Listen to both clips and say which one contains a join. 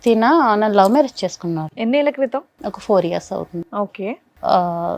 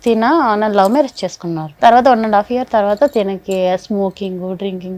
second; 1 cut; at 1.7 s

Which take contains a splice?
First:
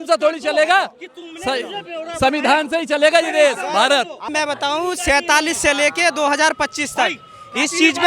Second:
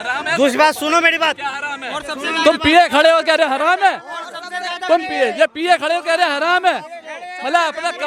first; 1 cut; at 4.3 s

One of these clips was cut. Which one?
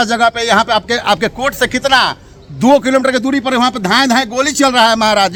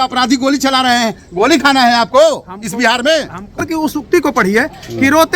second; 1 cut; at 3.6 s

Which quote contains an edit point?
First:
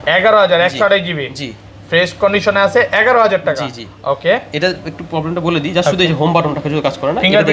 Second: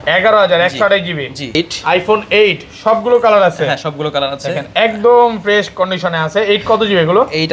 second; 1 cut; at 1.6 s

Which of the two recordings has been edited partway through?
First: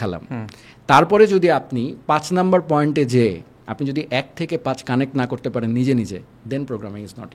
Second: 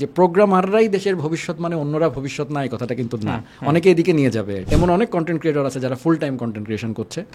second; 1 cut; at 4.7 s

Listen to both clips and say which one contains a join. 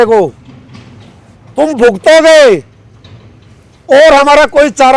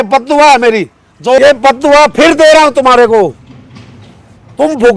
second; 1 cut; at 1.4 s

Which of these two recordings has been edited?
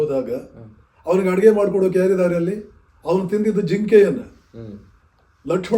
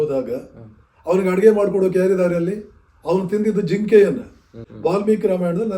second; 1 cut; at 4.6 s

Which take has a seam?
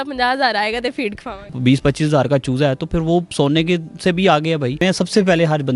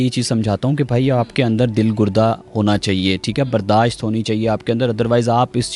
first; 2 cuts; at 1.5 s, 4.8 s

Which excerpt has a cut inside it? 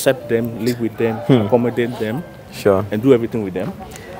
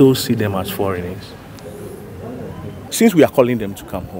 second; 1 cut; at 2.8 s

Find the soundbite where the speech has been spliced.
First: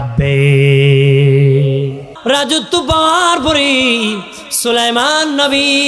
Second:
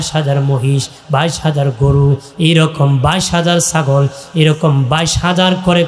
first; 1 cut; at 2.1 s

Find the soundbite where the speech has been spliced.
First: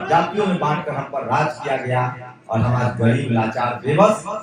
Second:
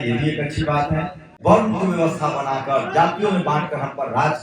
second; 1 cut; at 1.2 s

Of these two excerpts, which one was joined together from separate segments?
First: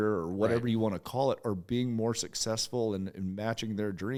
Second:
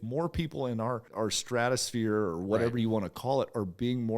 second; 1 cut; at 1.1 s

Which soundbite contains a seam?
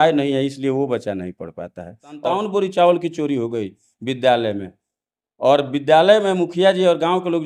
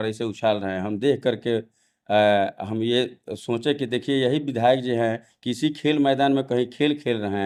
first; 1 cut; at 2.2 s

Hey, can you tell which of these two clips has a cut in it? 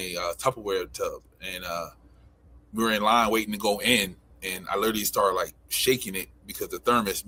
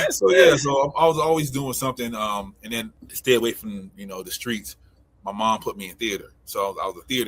second; 1 cut; at 3.0 s

